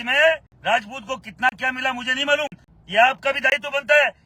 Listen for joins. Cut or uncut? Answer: cut